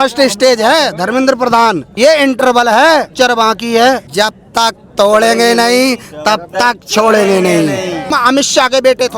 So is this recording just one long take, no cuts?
no; 4 cuts; at 1.9 s, 3.1 s, 4.1 s, 8.1 s

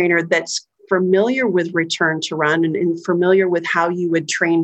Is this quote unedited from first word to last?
yes; 0 cuts

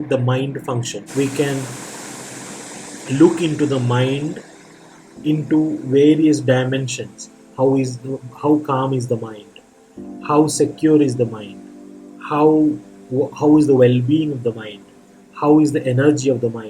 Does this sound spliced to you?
yes; 1 cut; at 1.0 s

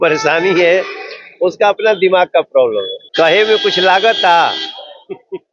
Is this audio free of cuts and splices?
no; 1 cut; at 3.0 s

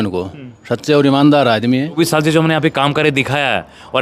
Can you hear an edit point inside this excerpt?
yes; 1 cut; at 2.0 s

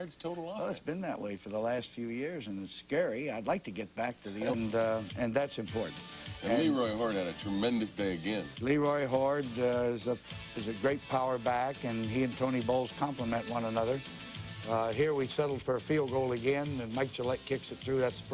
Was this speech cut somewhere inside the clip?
no; 0 cuts

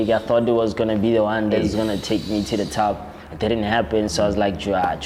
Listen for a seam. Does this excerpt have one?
no; 0 cuts

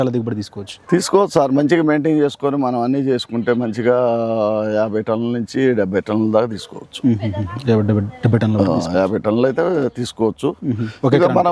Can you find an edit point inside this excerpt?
no; 0 cuts

